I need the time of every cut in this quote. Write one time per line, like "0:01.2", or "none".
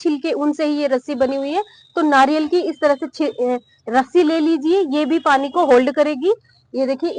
none